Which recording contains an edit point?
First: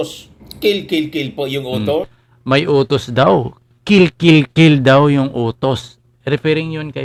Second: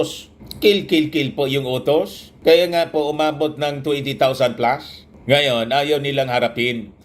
second; 2 cuts; at 2.2 s, 6.1 s

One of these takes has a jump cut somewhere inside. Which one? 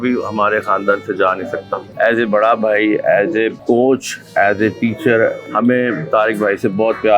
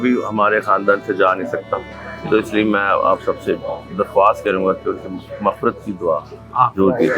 first; 3 cuts; at 1.8 s, 3.6 s, 5.4 s

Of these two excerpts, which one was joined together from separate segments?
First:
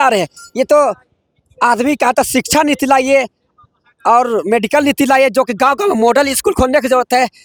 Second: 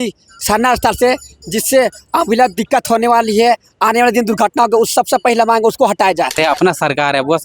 second; 1 cut; at 6.4 s

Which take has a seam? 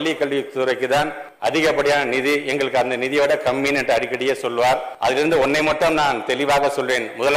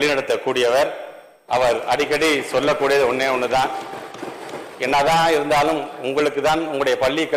first; 2 cuts; at 1.2 s, 4.9 s

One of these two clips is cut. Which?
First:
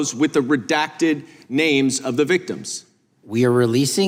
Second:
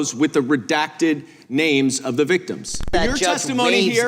second; 1 cut; at 2.9 s

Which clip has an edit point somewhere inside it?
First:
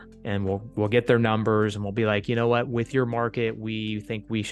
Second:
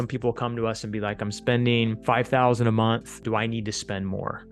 second; 2 cuts; at 2.0 s, 3.2 s

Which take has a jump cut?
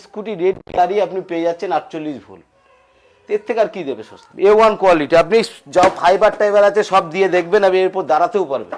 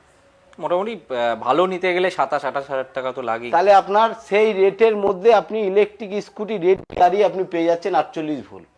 first; 1 cut; at 4.2 s

